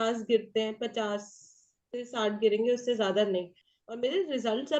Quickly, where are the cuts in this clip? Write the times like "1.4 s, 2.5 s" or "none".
3.6 s